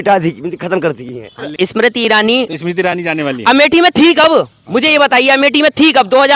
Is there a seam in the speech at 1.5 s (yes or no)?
yes